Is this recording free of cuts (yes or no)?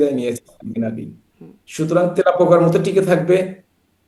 yes